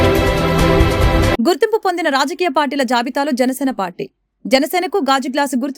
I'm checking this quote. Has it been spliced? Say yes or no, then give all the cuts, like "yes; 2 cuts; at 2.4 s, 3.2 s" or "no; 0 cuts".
yes; 1 cut; at 1.1 s